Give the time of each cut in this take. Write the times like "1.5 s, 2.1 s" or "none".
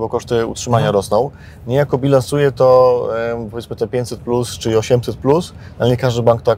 none